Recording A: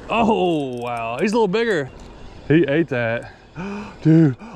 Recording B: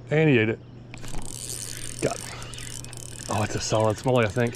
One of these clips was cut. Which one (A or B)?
A